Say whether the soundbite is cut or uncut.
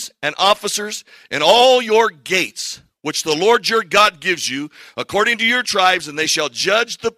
uncut